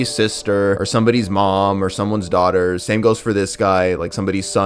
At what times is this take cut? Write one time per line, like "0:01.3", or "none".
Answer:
none